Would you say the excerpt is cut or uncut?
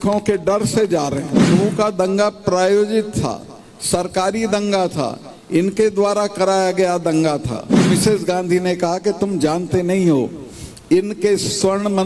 cut